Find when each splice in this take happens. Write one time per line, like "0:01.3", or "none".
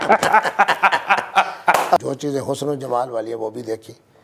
0:02.0